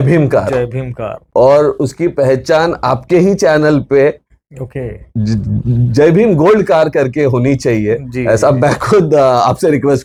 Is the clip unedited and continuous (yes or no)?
yes